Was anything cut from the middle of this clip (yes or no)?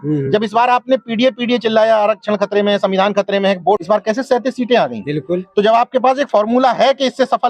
yes